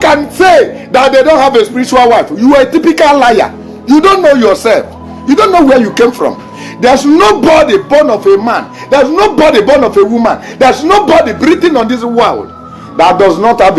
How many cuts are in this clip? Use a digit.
0